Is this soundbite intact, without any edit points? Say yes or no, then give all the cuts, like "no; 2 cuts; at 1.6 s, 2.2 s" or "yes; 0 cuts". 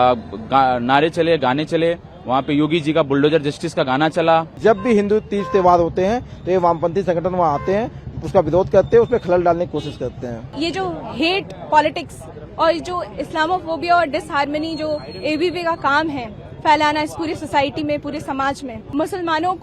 no; 3 cuts; at 4.5 s, 10.6 s, 18.8 s